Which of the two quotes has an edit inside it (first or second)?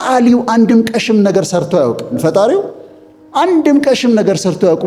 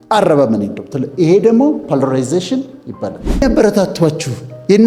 second